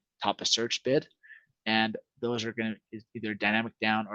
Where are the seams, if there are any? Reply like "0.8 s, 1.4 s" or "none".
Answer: none